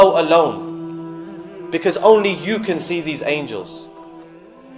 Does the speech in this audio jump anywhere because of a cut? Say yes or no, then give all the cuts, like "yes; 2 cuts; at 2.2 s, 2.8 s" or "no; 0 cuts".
no; 0 cuts